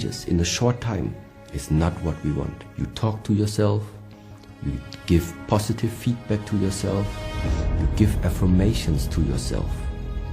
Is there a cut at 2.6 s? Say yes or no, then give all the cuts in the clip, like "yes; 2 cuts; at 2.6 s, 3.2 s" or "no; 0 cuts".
yes; 1 cut; at 2.6 s